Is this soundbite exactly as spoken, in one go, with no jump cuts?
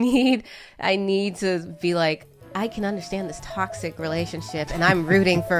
yes; 0 cuts

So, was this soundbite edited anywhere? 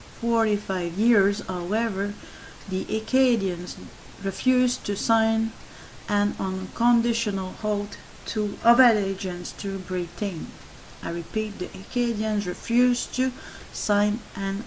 no; 0 cuts

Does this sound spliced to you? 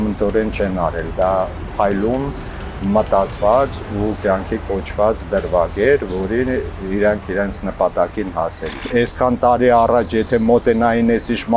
yes; 1 cut; at 8.9 s

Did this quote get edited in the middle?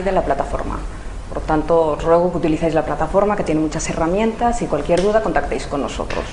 no; 0 cuts

